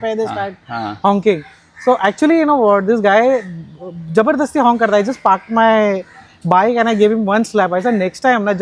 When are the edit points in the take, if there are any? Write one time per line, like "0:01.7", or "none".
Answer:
none